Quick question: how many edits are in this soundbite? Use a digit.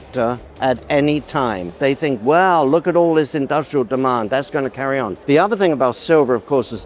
2